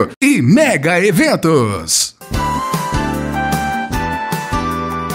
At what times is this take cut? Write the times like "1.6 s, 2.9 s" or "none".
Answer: none